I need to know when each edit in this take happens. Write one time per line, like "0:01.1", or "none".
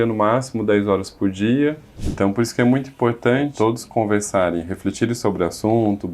0:01.9
0:03.5